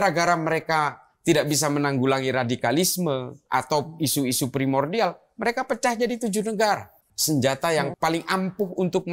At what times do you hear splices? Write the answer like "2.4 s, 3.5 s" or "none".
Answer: 7.1 s, 7.9 s